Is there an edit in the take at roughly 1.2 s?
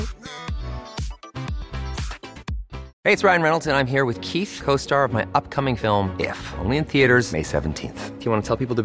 no; 1 cut; at 2.9 s

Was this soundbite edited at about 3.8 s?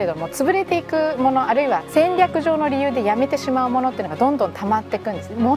no; 1 cut; at 1.9 s

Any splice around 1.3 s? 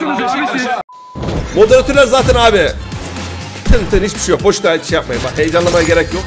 yes; 1 cut; at 1.3 s

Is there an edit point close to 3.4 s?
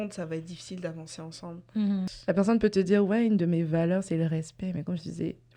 no; 1 cut; at 2.1 s

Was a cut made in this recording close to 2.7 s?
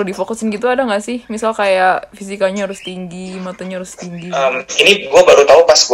no; 1 cut; at 4.4 s

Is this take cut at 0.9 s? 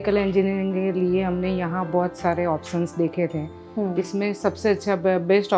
no; 0 cuts

